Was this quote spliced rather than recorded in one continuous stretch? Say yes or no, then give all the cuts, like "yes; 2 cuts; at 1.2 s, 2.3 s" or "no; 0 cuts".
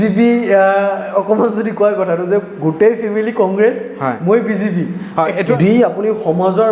yes; 1 cut; at 5.6 s